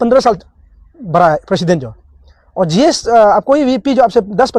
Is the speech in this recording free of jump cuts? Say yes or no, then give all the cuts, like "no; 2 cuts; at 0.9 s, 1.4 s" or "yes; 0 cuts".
yes; 0 cuts